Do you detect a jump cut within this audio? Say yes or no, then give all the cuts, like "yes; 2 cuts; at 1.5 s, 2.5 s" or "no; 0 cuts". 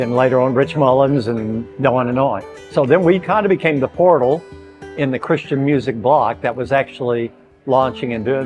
no; 0 cuts